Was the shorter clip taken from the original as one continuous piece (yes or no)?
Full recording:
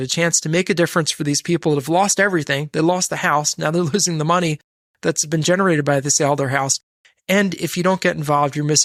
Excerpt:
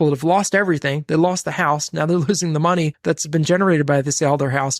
no